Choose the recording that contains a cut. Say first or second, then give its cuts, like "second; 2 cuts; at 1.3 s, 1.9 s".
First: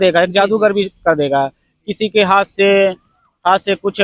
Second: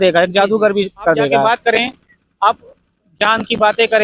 second; 1 cut; at 1.4 s